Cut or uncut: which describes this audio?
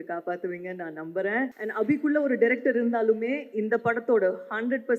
cut